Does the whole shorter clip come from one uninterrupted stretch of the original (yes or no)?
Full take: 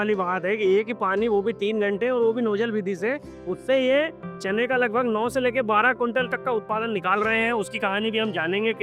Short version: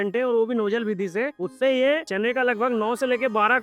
no